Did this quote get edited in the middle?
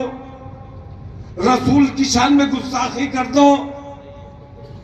no; 0 cuts

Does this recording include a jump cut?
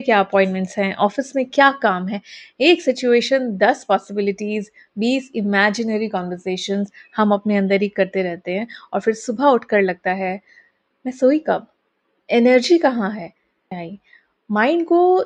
yes; 1 cut; at 13.9 s

